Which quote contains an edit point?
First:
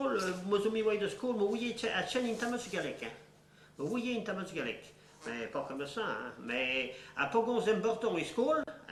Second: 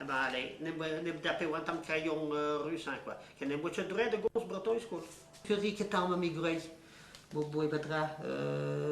second; 1 cut; at 5.4 s

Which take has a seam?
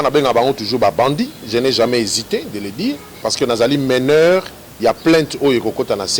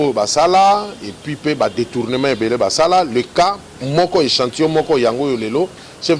first; 1 cut; at 3.2 s

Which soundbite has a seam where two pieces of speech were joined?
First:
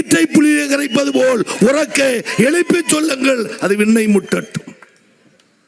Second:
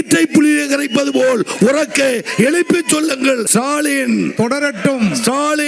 second; 1 cut; at 3.5 s

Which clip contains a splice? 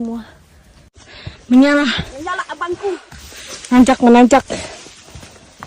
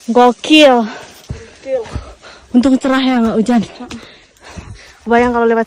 first; 1 cut; at 0.9 s

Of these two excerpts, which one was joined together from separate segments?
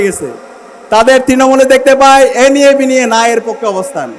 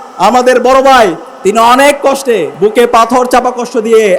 second; 2 cuts; at 1.3 s, 2.5 s

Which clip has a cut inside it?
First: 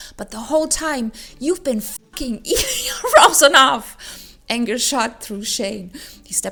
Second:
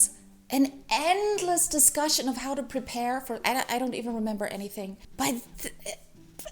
second; 1 cut; at 5.0 s

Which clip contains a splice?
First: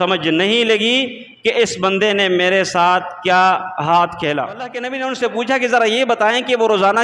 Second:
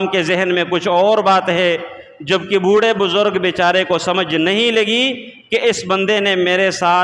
first; 1 cut; at 4.9 s

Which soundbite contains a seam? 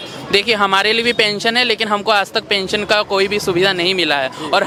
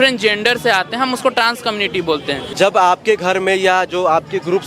second; 1 cut; at 2.5 s

